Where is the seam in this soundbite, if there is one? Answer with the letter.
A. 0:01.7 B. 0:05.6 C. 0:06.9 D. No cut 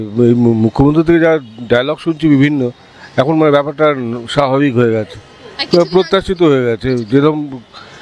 D